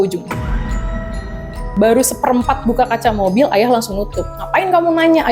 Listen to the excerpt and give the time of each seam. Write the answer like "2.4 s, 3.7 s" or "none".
1.6 s